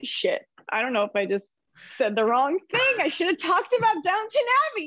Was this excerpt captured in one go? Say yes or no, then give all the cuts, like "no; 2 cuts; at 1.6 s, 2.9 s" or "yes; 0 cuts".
yes; 0 cuts